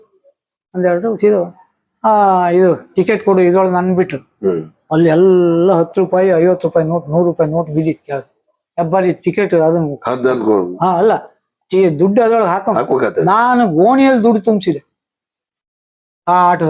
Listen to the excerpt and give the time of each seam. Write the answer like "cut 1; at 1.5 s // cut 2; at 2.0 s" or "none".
none